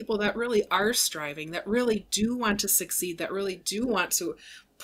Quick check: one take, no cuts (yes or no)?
yes